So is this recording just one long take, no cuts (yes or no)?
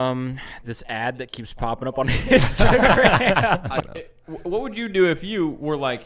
no